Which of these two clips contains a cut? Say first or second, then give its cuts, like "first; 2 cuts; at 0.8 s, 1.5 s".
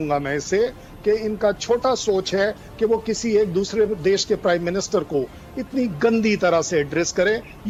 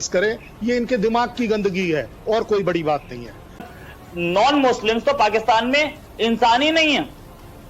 second; 1 cut; at 3.6 s